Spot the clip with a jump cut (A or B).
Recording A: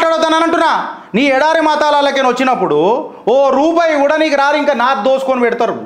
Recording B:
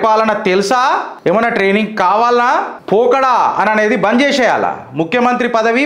B